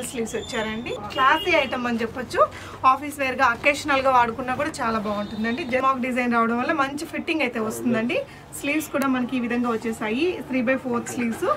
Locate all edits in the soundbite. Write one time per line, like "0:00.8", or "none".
0:01.1
0:05.8